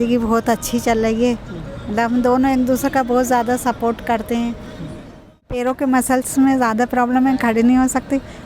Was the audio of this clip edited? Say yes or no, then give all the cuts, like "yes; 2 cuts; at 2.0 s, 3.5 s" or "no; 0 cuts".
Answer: yes; 1 cut; at 5.6 s